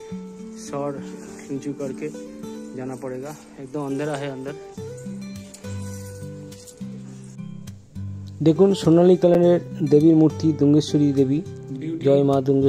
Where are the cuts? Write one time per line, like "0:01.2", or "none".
none